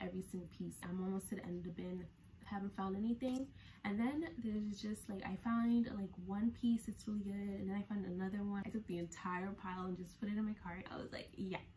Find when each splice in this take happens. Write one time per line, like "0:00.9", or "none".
0:00.8
0:08.6
0:10.8